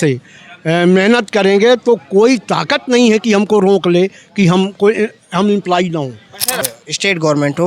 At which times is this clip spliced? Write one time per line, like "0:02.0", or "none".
0:06.7

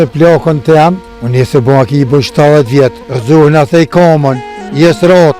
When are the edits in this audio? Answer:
0:01.1

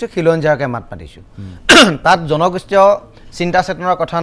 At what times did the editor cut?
none

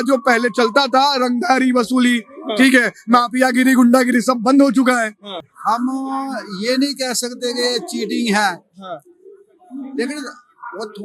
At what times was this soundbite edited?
0:05.2

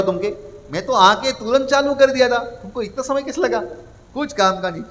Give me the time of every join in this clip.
none

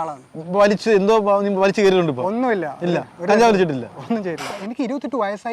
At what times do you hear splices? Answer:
0:04.5

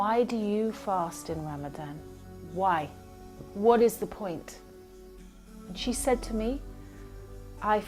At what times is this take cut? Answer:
none

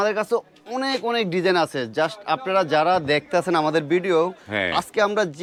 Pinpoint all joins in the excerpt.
none

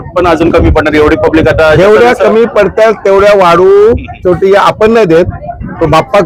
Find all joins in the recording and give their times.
none

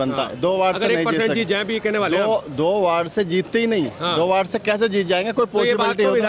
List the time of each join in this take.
none

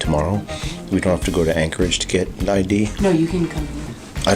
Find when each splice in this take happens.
0:03.0

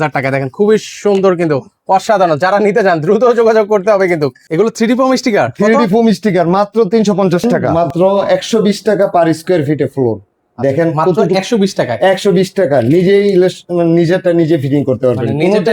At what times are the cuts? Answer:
0:04.4
0:07.6

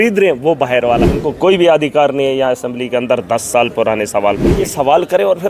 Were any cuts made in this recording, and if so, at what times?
0:01.2
0:04.6

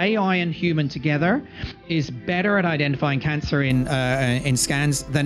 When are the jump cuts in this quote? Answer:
none

